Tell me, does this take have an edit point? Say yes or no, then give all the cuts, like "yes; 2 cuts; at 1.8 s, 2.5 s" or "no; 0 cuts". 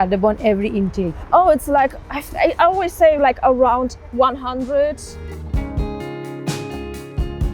no; 0 cuts